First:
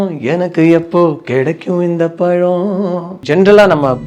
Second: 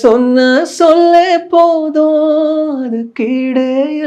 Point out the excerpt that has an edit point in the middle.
first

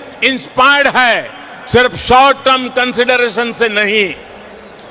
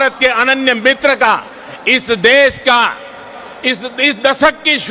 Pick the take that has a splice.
first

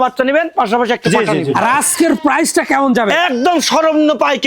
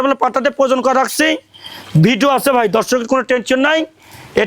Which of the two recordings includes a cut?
first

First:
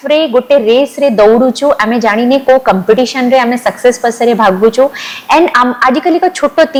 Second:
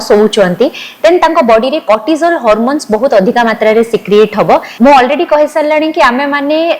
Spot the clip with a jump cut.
second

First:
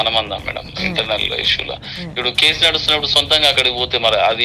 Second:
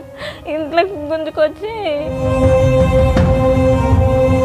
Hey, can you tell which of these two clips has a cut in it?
second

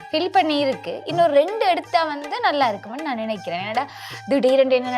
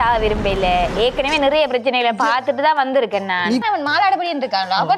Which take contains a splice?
second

